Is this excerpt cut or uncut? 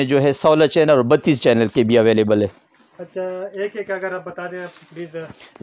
uncut